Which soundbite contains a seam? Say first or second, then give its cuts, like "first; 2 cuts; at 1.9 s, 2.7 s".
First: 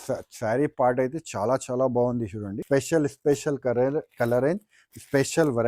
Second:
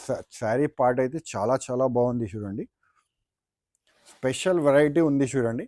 first; 1 cut; at 2.5 s